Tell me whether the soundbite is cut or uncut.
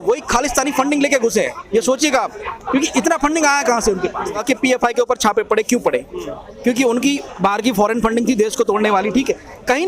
cut